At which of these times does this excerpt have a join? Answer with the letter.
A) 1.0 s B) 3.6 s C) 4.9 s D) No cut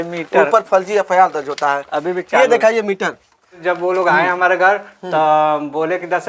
B